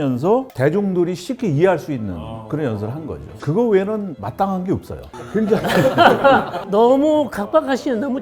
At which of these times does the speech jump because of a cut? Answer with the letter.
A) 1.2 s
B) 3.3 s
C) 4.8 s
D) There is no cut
B